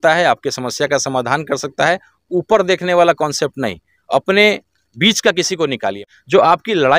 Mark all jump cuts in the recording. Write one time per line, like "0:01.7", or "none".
0:06.1